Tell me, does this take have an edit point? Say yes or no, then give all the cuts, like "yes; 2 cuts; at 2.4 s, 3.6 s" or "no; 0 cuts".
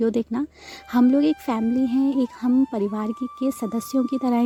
no; 0 cuts